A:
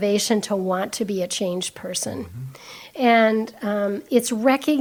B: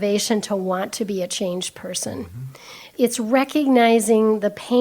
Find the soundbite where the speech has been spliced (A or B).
B